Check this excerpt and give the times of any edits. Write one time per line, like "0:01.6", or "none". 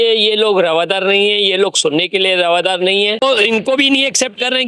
0:03.2